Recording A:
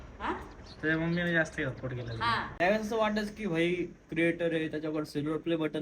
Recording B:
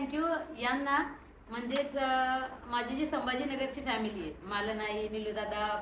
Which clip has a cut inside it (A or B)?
A